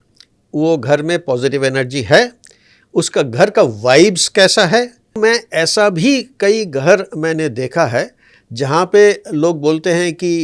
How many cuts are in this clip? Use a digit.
1